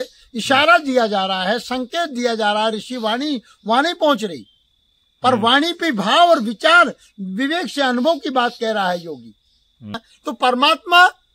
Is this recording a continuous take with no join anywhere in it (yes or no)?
no